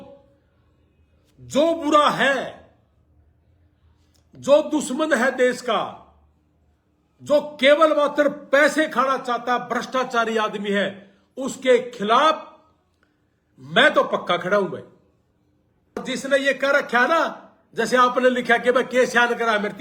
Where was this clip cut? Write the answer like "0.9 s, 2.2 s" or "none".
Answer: 16.0 s